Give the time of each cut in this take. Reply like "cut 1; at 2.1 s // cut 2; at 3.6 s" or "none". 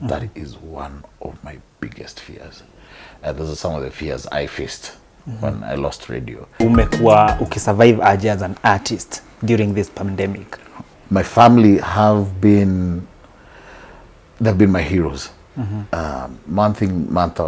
cut 1; at 6.6 s // cut 2; at 10.9 s

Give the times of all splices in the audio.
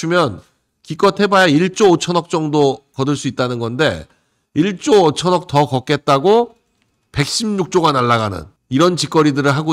none

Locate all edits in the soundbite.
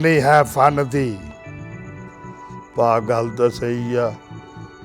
cut 1; at 1.4 s // cut 2; at 2.7 s

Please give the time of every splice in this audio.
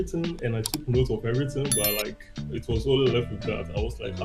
none

